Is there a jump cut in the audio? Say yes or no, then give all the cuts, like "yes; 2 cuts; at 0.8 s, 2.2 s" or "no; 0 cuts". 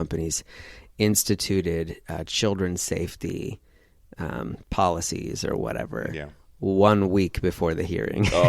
no; 0 cuts